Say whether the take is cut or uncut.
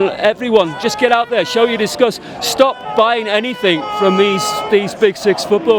uncut